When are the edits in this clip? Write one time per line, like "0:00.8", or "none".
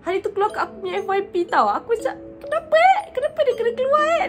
none